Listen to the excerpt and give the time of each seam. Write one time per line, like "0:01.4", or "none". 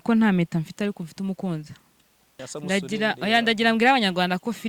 0:02.4